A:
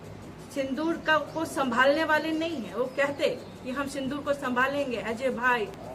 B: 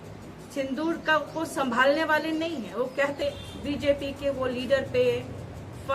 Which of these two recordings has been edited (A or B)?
B